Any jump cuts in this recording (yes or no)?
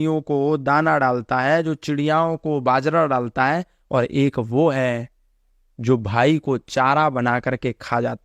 no